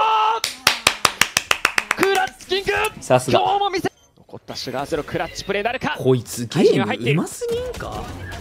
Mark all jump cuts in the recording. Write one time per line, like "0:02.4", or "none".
0:03.9